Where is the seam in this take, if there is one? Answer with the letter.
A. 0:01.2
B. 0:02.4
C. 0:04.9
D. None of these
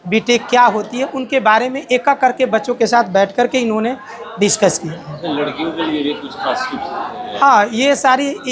D